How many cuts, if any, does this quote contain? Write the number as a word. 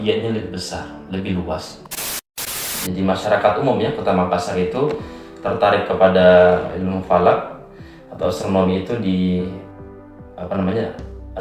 one